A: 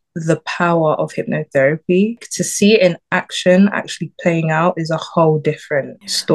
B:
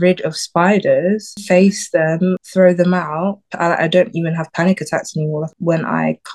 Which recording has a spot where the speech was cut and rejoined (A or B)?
B